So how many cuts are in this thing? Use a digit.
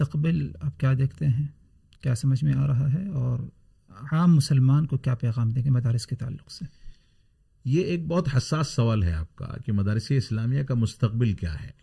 0